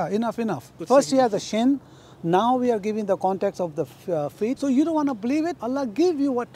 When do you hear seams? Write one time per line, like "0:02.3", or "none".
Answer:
0:00.8
0:04.6
0:05.6